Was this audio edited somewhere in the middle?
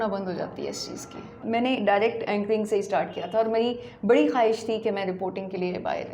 yes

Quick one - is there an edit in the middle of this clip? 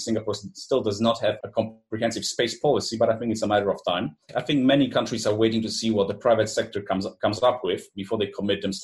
yes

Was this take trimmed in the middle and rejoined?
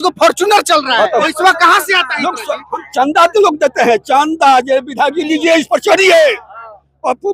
yes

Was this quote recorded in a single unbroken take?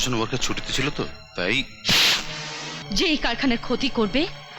no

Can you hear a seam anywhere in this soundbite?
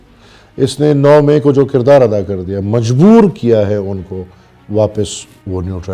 no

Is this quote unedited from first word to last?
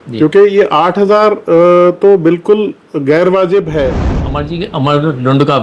no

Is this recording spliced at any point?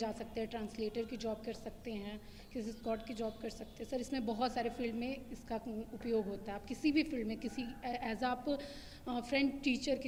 no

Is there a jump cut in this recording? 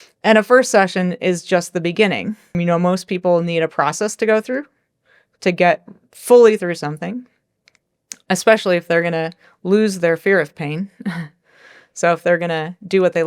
yes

